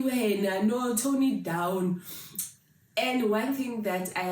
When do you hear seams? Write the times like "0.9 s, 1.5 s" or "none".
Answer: none